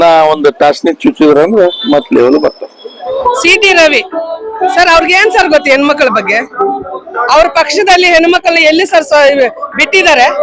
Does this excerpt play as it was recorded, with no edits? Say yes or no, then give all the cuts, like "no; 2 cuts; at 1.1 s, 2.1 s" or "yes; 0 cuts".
no; 1 cut; at 3.2 s